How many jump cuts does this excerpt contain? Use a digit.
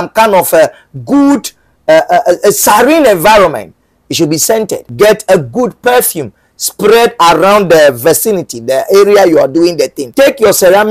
2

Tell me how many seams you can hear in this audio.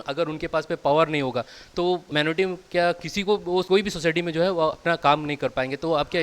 2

